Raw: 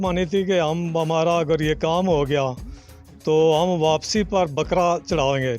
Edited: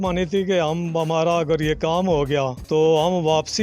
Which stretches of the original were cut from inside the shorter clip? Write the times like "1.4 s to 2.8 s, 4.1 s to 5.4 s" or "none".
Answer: 2.6 s to 3.1 s